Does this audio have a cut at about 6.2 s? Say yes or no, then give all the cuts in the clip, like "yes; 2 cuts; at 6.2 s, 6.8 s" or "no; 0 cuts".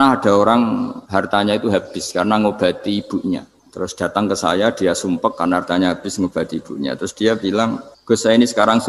no; 3 cuts; at 1.0 s, 3.6 s, 7.9 s